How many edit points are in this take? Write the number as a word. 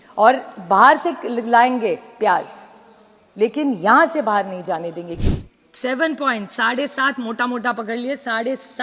one